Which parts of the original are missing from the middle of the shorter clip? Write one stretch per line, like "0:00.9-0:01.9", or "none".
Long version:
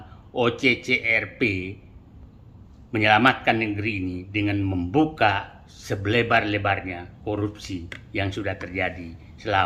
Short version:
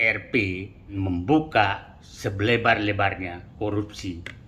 0:02.0-0:04.6

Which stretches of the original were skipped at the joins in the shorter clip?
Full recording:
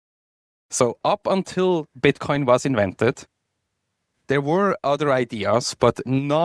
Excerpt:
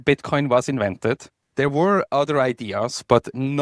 0:03.3-0:04.1

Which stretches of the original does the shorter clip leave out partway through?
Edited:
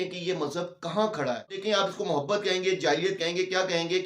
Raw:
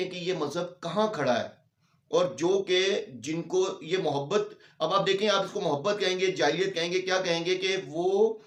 0:01.6-0:05.2

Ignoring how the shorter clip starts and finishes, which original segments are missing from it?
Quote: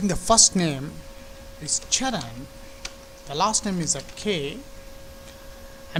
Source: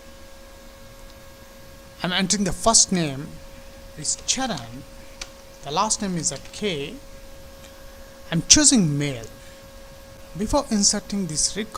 none

